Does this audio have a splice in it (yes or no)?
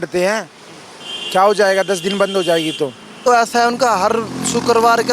yes